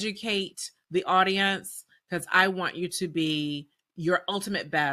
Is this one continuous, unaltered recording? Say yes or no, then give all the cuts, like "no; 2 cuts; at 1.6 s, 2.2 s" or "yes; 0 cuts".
yes; 0 cuts